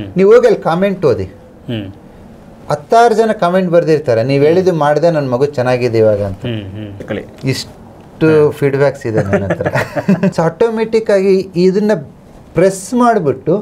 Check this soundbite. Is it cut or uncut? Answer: cut